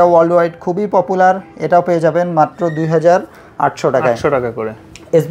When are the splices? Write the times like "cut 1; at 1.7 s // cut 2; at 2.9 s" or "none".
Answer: none